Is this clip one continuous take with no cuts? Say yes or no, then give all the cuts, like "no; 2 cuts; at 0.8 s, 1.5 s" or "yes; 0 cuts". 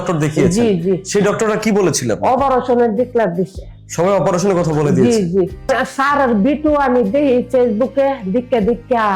no; 1 cut; at 5.7 s